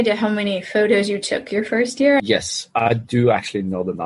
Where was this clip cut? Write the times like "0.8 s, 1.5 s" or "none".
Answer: 2.2 s